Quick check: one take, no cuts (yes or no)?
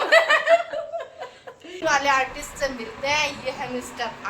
no